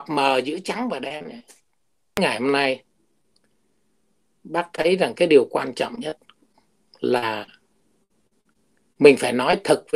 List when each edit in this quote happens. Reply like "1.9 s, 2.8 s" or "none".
2.2 s